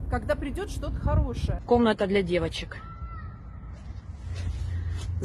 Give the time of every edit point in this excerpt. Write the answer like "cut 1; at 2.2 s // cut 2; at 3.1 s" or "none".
cut 1; at 1.5 s